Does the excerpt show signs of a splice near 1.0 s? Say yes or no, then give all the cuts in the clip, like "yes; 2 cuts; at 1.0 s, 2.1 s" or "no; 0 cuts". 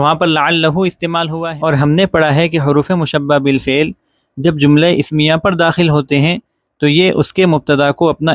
yes; 1 cut; at 1.0 s